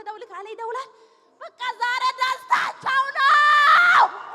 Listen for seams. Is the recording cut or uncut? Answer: uncut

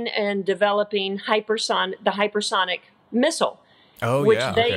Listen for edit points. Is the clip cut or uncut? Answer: uncut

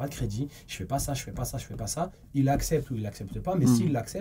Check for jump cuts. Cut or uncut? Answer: uncut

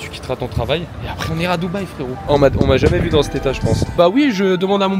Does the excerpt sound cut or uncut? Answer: cut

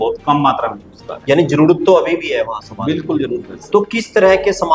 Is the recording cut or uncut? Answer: uncut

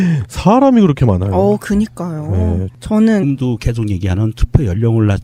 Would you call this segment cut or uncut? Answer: uncut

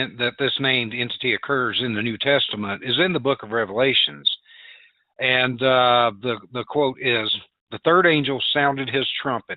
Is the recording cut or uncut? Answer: cut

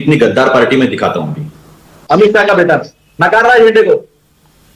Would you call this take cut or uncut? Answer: cut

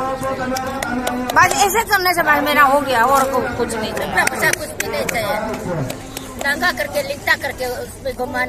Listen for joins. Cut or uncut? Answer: uncut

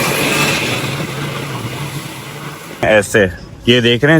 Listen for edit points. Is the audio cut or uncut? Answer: cut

